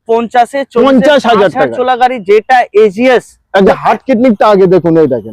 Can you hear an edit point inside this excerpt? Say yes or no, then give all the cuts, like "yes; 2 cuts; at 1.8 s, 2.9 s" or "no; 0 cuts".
yes; 1 cut; at 3.7 s